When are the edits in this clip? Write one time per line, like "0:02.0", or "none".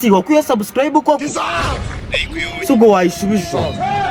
none